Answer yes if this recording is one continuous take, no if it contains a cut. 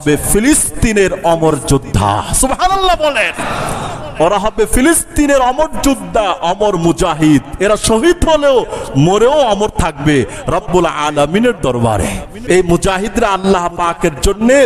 no